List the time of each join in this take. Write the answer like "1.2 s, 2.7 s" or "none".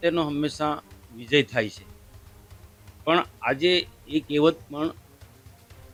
none